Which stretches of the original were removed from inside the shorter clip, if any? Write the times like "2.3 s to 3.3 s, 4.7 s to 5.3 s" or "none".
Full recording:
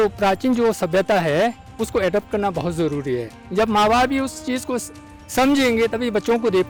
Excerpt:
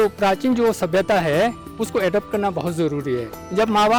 none